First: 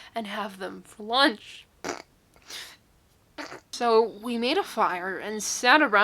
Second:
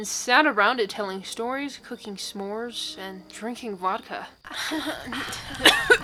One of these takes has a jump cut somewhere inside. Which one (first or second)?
first